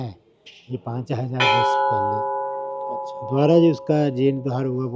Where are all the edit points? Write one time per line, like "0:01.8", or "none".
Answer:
none